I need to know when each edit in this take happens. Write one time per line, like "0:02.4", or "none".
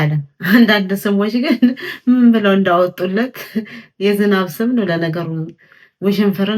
none

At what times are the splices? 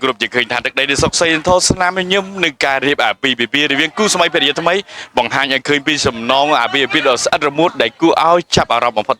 none

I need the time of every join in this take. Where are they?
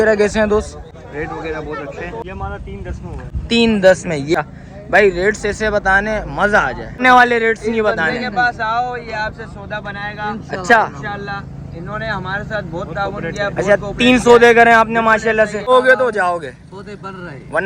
0:00.9
0:02.2
0:04.3
0:07.0
0:15.7

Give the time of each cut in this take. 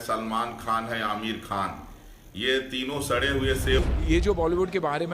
0:03.8

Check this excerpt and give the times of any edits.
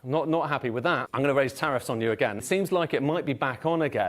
0:01.1
0:02.4

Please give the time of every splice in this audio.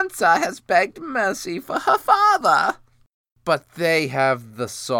0:03.3

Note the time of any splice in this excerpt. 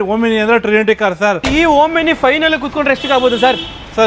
0:01.5

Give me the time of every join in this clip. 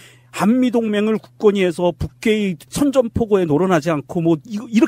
0:01.9

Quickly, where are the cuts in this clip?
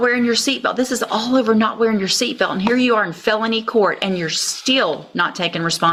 none

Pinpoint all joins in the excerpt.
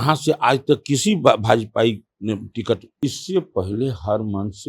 0:02.9

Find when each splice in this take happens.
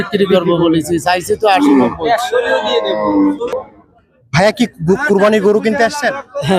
0:03.1

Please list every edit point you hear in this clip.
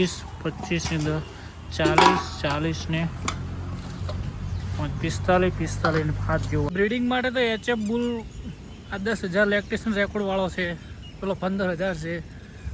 0:06.7

